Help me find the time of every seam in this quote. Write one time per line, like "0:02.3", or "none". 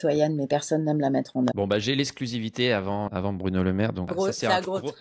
0:01.5
0:03.1
0:04.1

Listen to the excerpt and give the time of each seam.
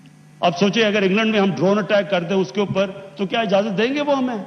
none

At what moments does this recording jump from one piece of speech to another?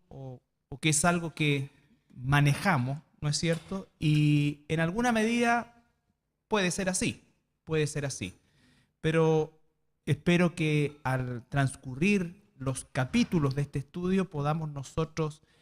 0:05.1

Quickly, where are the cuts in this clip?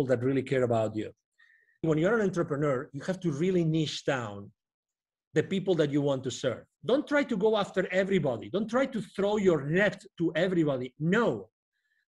0:01.9
0:06.7

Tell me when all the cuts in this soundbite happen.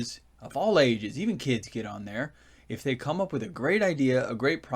0:02.3

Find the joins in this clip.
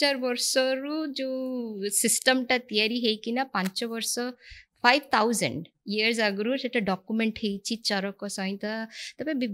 none

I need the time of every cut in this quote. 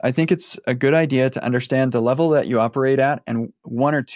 none

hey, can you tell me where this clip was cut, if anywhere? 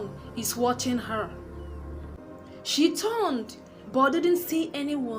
0:02.2

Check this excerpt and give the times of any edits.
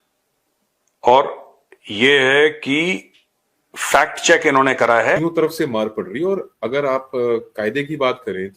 0:05.2

